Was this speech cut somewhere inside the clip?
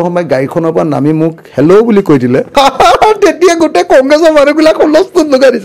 yes; 1 cut; at 2.5 s

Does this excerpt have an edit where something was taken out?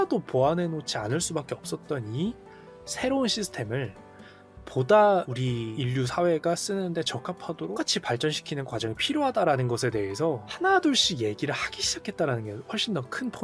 yes; 1 cut; at 5.4 s

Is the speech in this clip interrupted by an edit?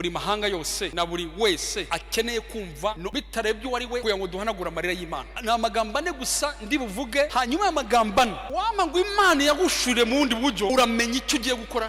yes; 8 cuts; at 0.9 s, 1.9 s, 3.0 s, 4.0 s, 5.3 s, 7.3 s, 8.4 s, 10.7 s

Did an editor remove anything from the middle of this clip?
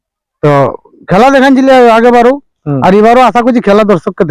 no; 0 cuts

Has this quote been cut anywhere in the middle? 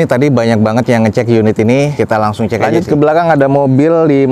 yes; 1 cut; at 2.6 s

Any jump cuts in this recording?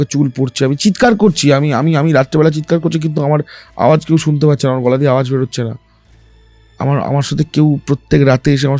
no; 0 cuts

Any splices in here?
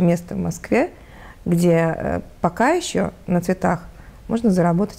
no; 0 cuts

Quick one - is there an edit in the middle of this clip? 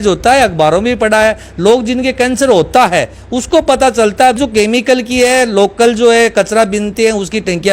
yes; 1 cut; at 4.4 s

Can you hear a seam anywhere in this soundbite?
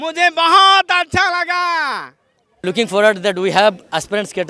yes; 1 cut; at 2.6 s

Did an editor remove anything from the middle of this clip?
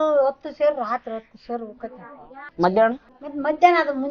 no; 0 cuts

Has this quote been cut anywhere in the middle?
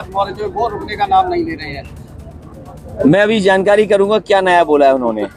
no; 0 cuts

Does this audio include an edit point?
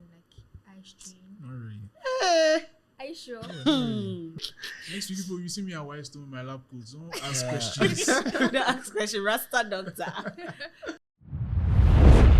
yes; 2 cuts; at 4.4 s, 11.1 s

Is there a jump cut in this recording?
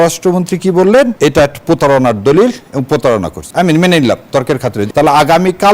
yes; 3 cuts; at 1.1 s, 3.4 s, 4.8 s

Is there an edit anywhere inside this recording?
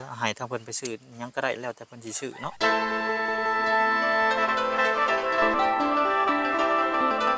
yes; 1 cut; at 2.5 s

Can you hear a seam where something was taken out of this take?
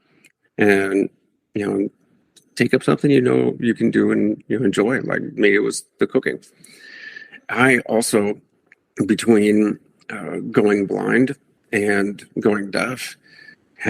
no; 0 cuts

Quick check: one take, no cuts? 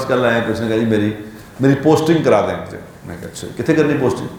yes; 0 cuts

